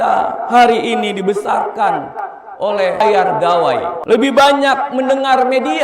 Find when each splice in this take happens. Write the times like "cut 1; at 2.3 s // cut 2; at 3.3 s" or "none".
cut 1; at 3.0 s // cut 2; at 4.0 s